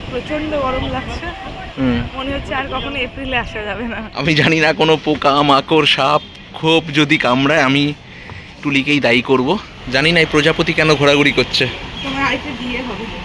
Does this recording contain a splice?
yes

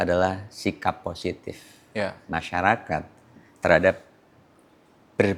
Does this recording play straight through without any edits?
yes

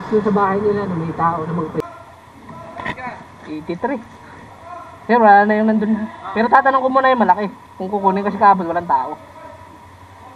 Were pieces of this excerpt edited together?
yes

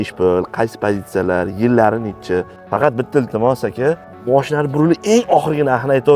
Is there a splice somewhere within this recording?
yes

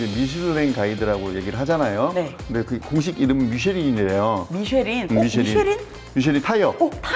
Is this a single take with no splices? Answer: yes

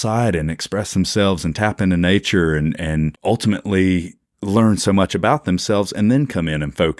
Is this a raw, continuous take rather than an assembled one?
no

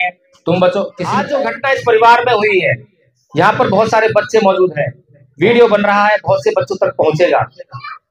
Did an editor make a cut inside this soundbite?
yes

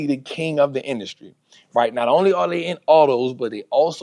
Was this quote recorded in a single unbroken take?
yes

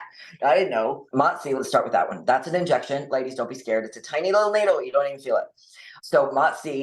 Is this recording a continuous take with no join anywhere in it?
no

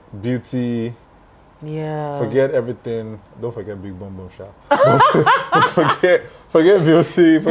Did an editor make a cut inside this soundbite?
no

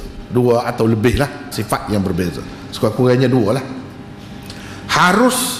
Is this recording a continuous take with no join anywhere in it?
no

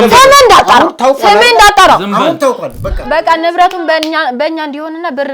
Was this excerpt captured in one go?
no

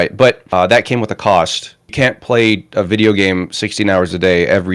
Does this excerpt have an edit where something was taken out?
no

